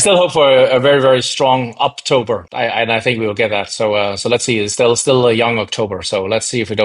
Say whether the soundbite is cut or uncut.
cut